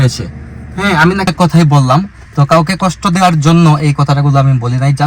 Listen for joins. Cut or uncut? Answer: cut